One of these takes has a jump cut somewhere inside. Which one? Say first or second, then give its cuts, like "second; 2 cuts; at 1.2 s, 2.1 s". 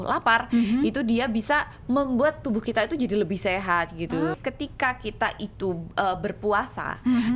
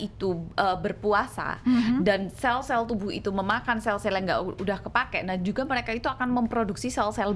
first; 1 cut; at 4.4 s